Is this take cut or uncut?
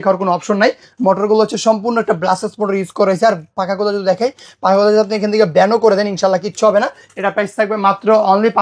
uncut